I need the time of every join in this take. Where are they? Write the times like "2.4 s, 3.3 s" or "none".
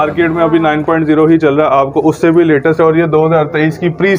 none